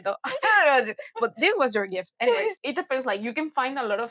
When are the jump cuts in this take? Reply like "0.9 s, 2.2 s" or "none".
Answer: 2.6 s